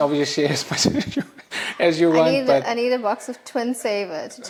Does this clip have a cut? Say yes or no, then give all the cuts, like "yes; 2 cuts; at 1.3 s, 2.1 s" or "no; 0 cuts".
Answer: no; 0 cuts